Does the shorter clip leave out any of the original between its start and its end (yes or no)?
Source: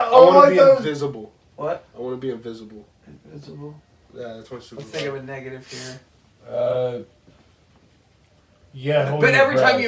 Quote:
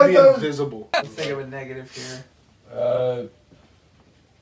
yes